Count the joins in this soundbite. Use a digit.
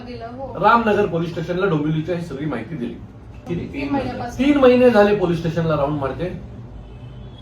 1